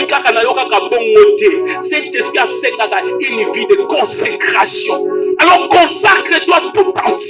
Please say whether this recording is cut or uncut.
uncut